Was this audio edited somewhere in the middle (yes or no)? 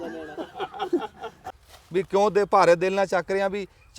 yes